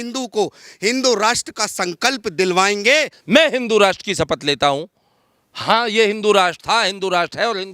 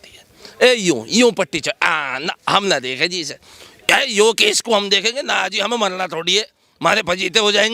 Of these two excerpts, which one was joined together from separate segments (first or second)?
first